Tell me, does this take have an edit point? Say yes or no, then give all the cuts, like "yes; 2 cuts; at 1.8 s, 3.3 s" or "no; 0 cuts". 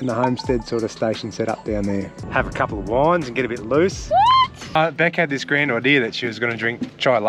yes; 2 cuts; at 2.2 s, 4.8 s